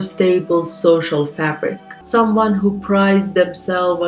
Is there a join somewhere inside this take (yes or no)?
yes